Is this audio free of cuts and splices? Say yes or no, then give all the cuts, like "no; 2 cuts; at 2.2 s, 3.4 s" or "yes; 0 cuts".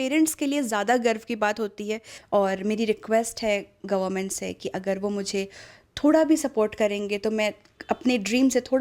no; 1 cut; at 2.1 s